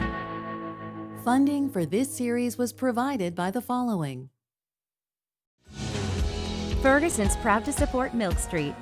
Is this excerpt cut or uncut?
cut